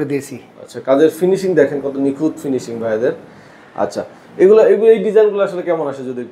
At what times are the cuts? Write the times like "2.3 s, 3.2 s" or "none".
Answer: none